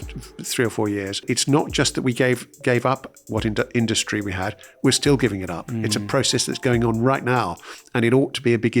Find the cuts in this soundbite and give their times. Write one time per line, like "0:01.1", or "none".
0:01.2